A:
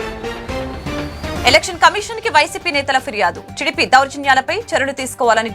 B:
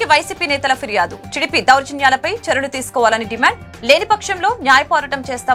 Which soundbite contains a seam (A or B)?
A